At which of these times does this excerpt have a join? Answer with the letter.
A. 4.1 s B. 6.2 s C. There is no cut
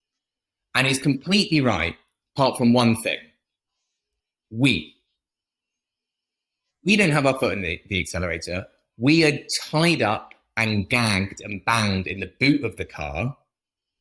A